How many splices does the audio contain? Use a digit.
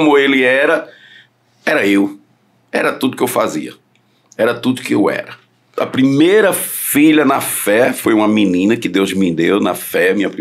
1